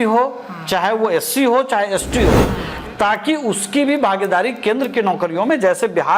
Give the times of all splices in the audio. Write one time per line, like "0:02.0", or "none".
0:02.5